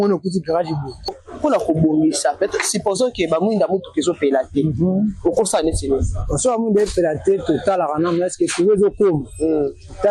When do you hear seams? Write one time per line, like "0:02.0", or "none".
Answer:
0:01.2